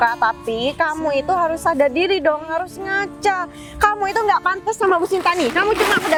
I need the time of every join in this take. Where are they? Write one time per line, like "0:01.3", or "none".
none